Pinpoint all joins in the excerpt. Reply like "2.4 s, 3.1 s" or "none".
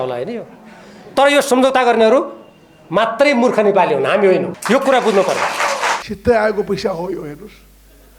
4.5 s, 6.0 s